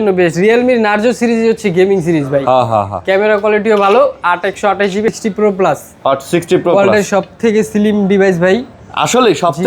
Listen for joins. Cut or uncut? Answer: cut